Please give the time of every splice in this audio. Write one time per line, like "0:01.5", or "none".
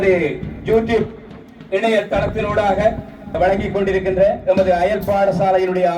0:03.4